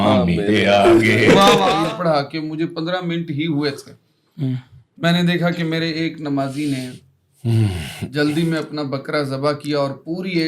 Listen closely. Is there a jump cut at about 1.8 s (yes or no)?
yes